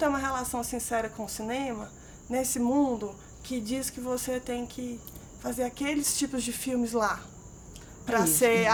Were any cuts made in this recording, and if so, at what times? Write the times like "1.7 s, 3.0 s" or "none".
none